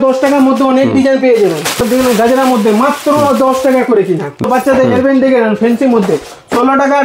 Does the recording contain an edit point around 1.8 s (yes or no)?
yes